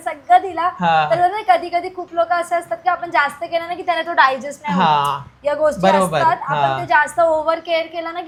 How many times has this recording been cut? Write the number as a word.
zero